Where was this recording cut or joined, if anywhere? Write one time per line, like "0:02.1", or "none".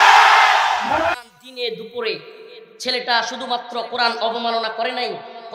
0:01.2